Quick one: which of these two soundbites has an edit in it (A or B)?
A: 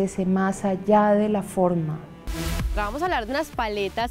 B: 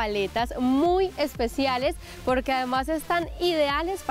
A